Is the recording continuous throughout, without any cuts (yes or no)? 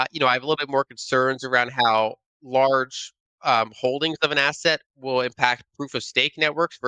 yes